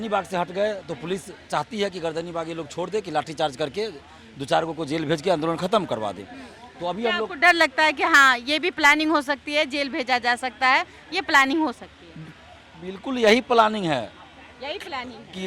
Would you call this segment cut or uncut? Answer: uncut